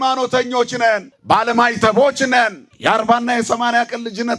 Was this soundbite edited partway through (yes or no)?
yes